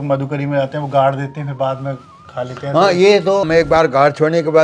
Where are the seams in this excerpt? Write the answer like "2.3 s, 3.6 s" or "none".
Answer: 3.4 s